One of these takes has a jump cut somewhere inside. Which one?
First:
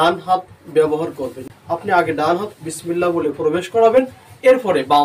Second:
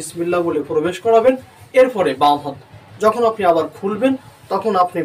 first; 1 cut; at 1.4 s

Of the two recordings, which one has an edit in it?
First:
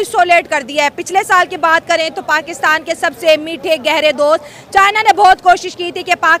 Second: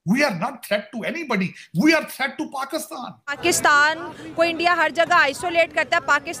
second; 1 cut; at 3.4 s

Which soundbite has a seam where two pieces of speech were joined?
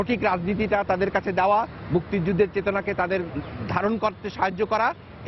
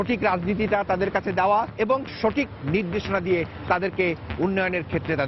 second; 1 cut; at 1.7 s

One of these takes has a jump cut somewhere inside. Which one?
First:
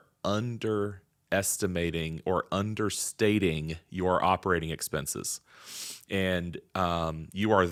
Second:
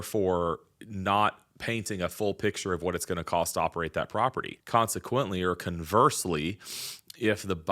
second; 1 cut; at 4.6 s

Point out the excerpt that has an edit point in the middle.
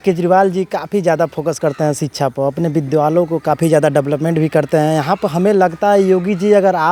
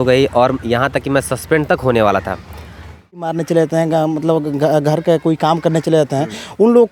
second; 1 cut; at 3.3 s

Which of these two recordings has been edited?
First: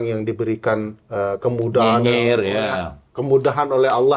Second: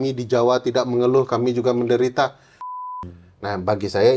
second; 1 cut; at 2.7 s

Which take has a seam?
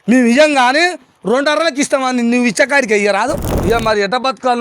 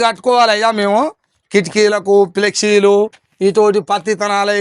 first; 1 cut; at 3.5 s

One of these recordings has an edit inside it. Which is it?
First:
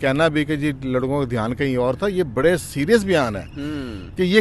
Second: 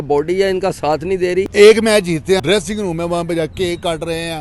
second; 2 cuts; at 1.5 s, 2.4 s

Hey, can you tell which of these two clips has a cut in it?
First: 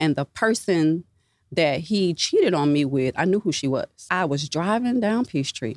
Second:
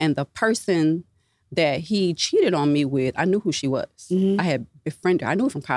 first; 1 cut; at 4.1 s

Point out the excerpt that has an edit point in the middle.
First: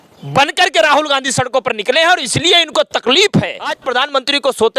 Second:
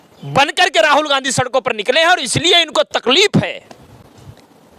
first; 1 cut; at 3.8 s

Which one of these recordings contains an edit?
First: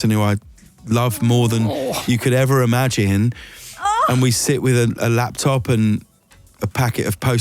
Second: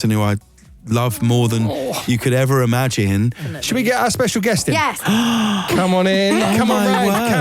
second; 2 cuts; at 3.5 s, 5.0 s

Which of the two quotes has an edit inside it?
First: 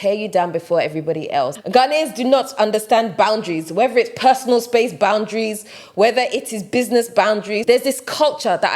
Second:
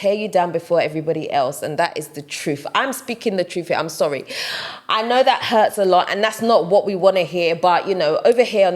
first; 2 cuts; at 1.6 s, 7.6 s

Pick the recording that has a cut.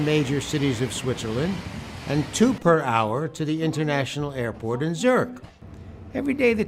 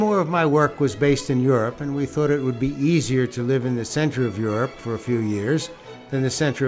second; 1 cut; at 1.7 s

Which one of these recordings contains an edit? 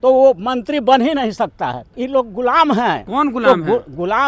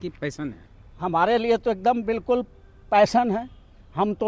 first; 2 cuts; at 1.9 s, 3.1 s

